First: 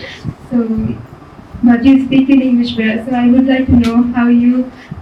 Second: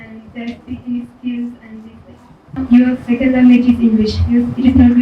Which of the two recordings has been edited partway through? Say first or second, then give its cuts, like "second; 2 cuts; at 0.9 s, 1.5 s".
second; 1 cut; at 2.6 s